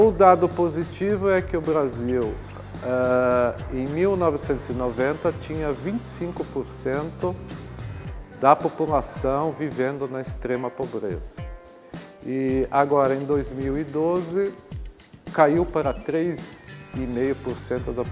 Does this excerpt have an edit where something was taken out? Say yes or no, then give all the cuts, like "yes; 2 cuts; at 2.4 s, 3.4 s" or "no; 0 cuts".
no; 0 cuts